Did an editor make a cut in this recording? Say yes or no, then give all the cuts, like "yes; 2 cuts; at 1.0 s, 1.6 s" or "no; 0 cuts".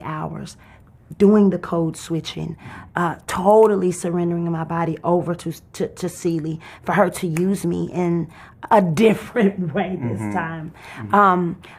no; 0 cuts